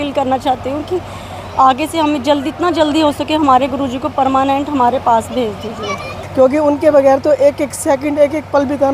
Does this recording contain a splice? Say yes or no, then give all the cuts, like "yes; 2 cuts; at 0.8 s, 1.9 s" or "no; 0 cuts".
yes; 1 cut; at 6.2 s